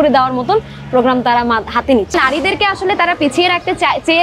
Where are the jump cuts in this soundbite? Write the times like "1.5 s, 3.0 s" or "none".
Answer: 2.1 s